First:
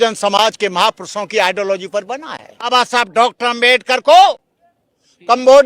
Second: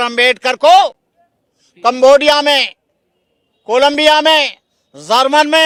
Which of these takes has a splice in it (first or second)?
first